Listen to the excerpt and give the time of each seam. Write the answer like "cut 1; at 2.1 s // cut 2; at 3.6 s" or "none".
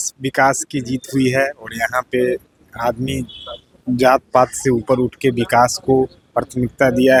none